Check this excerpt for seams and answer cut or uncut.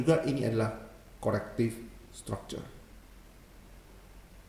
uncut